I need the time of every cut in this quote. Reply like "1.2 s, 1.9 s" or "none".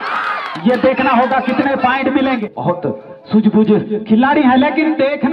2.4 s